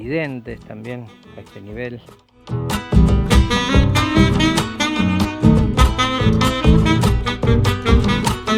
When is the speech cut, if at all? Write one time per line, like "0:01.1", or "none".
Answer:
none